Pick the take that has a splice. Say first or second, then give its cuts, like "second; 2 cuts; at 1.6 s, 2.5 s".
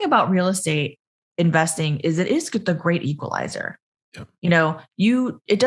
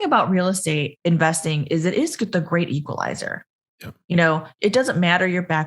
second; 2 cuts; at 0.9 s, 4.5 s